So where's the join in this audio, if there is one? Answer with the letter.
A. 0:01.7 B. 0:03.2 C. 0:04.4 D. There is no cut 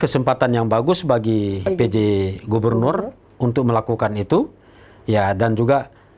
A